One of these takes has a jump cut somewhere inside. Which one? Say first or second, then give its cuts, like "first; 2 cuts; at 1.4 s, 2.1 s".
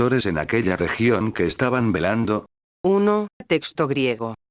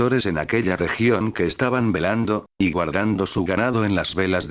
second; 1 cut; at 2.5 s